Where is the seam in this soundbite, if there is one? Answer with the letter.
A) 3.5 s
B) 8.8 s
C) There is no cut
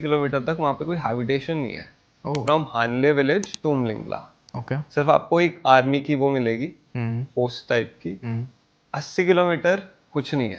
A